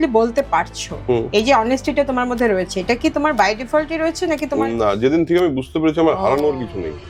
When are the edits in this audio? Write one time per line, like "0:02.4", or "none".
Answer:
none